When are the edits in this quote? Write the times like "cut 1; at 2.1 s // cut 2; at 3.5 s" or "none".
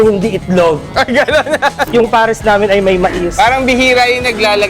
cut 1; at 1.8 s